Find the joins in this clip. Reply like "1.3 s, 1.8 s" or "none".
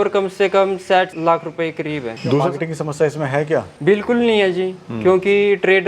2.4 s